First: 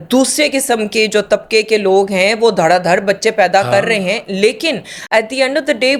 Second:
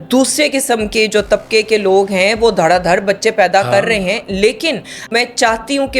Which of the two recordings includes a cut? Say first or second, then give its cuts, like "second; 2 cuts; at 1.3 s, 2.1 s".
second; 1 cut; at 5.0 s